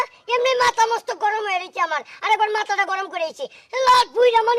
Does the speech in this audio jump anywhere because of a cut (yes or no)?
no